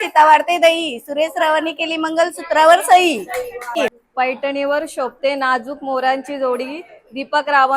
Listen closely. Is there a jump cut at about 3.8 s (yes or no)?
yes